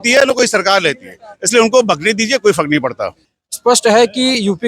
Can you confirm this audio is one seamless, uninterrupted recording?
no; 1 cut; at 3.2 s

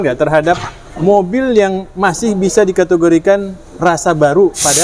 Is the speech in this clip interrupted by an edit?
no; 0 cuts

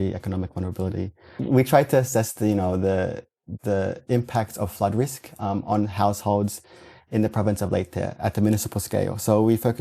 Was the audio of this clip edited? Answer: yes; 1 cut; at 1.4 s

